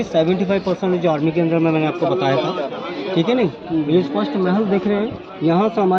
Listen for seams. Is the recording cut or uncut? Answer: uncut